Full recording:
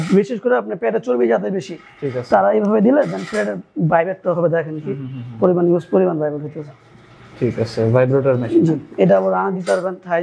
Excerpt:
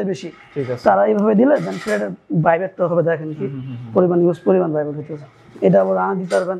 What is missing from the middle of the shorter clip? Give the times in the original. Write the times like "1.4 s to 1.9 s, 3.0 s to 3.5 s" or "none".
7.0 s to 8.9 s